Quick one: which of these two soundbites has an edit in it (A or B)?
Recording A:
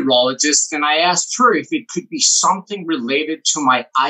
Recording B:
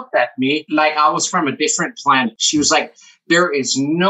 B